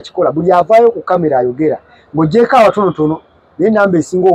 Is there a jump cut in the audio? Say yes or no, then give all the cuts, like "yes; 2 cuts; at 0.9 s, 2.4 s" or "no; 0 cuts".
no; 0 cuts